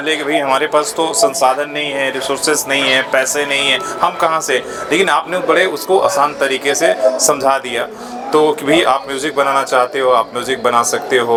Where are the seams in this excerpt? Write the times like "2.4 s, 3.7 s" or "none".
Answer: none